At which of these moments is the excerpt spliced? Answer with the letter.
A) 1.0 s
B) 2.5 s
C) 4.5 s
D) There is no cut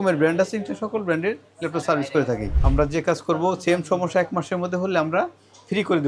B